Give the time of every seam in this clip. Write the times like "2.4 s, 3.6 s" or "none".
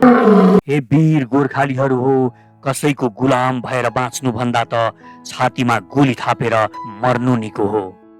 none